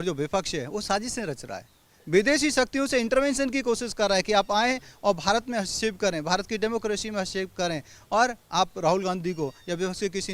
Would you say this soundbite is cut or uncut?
uncut